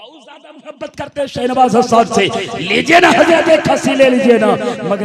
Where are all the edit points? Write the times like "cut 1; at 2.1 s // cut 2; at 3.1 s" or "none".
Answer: none